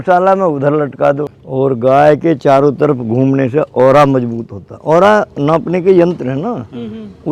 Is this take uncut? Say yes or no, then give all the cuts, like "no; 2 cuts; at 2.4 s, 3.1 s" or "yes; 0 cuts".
no; 1 cut; at 1.3 s